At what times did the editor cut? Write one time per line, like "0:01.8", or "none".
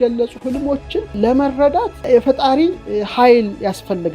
0:01.1
0:02.0